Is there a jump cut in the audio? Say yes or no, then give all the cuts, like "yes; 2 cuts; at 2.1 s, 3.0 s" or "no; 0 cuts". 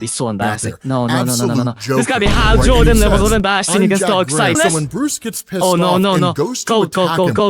yes; 1 cut; at 4.6 s